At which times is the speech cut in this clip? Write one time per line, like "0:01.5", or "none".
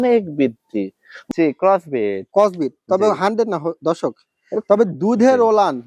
0:01.2